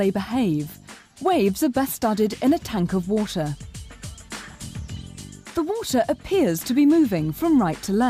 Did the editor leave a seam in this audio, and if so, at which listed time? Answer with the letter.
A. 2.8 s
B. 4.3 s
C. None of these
A